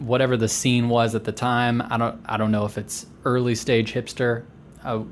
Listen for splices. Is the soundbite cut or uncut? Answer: uncut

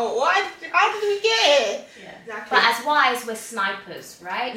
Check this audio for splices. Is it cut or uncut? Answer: cut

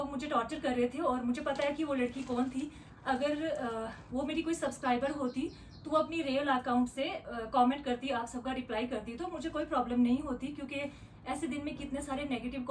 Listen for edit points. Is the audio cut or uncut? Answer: uncut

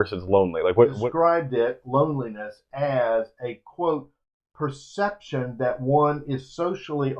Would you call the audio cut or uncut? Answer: cut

